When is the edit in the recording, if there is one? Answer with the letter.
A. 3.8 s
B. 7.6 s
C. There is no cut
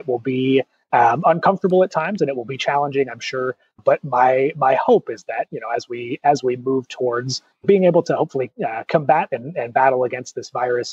B